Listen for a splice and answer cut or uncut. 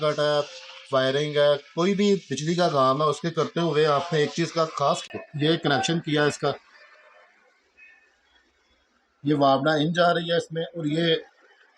cut